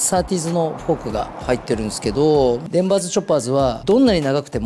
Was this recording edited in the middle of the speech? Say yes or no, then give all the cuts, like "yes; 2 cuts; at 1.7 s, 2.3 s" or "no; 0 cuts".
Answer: yes; 2 cuts; at 2.6 s, 3.8 s